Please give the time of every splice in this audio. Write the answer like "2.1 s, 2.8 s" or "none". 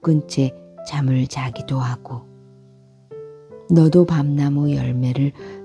2.1 s, 3.6 s